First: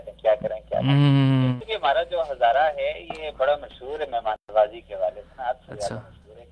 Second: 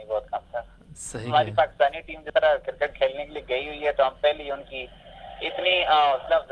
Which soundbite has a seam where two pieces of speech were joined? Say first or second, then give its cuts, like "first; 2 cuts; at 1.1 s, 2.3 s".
first; 1 cut; at 1.5 s